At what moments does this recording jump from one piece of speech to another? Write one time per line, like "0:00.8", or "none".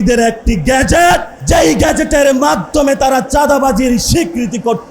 0:01.3